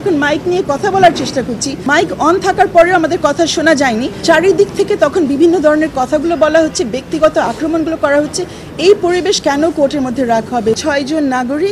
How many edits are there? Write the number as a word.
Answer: three